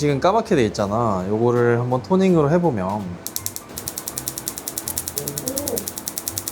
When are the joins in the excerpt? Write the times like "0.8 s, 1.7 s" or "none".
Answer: 3.2 s